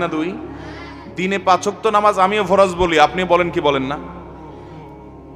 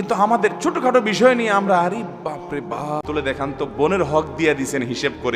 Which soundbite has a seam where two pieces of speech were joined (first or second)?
second